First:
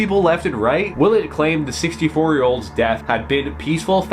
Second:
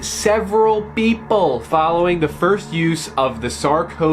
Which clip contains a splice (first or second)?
first